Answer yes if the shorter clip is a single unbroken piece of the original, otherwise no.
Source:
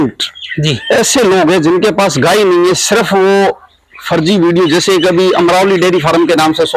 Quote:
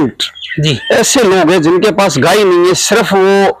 yes